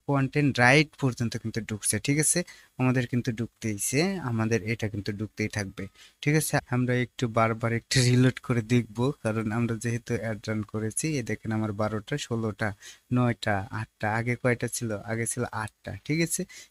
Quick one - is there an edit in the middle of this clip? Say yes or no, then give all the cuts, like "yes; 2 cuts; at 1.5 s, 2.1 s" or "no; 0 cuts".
yes; 1 cut; at 6.7 s